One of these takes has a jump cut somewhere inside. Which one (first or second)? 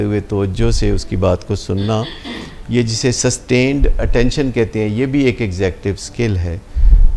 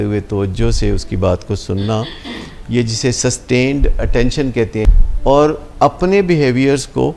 second